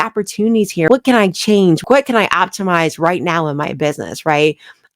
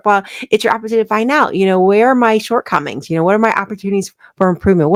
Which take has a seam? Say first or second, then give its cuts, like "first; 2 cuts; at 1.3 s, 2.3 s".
first; 2 cuts; at 0.9 s, 1.8 s